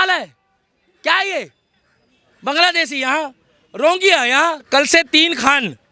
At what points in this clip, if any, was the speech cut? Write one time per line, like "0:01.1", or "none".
0:04.7